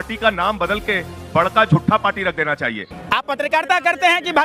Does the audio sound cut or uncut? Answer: cut